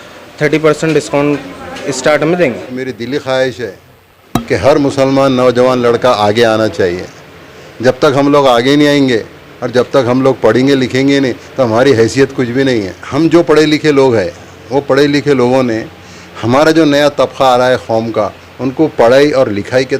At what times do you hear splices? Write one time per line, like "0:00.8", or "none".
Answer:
0:02.7
0:13.0